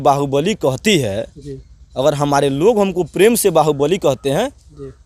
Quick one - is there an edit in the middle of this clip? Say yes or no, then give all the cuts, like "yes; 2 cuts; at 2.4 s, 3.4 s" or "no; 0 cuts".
no; 0 cuts